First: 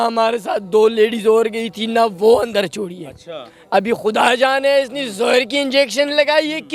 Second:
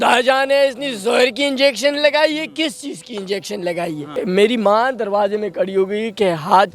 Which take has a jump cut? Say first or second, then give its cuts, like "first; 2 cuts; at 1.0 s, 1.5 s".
second; 1 cut; at 4.0 s